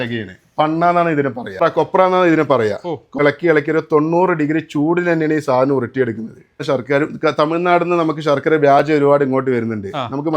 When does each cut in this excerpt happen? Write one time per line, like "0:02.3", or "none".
0:01.6
0:03.2
0:06.5